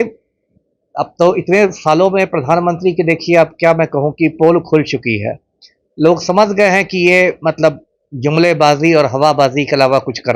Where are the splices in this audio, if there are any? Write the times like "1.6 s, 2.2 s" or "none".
none